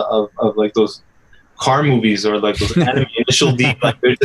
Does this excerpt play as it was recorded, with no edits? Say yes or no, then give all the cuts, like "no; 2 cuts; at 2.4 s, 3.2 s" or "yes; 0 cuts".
yes; 0 cuts